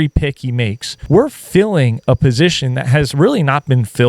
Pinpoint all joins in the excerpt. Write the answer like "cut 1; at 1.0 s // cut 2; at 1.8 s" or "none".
cut 1; at 0.9 s

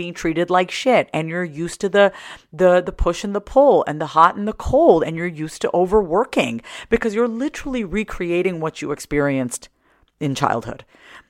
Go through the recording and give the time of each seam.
none

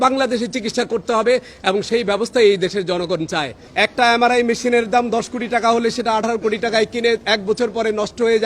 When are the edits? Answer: cut 1; at 3.6 s

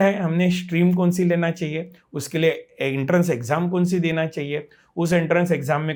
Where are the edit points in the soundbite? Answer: none

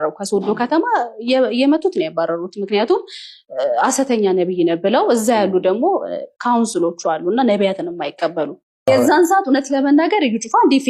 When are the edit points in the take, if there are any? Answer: none

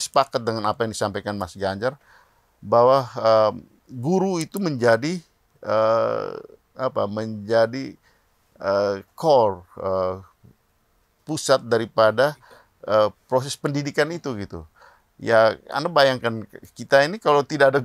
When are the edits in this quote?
none

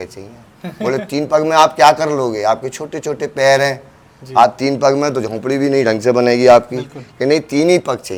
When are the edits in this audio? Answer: none

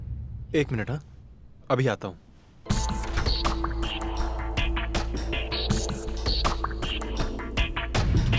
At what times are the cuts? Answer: cut 1; at 2.6 s

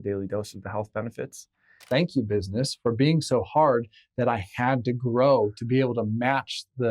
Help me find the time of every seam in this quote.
cut 1; at 1.8 s

